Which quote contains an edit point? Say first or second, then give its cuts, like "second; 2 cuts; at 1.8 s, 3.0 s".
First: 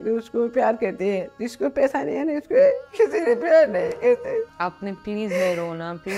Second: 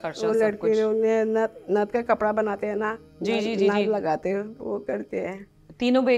first; 2 cuts; at 2.9 s, 4.5 s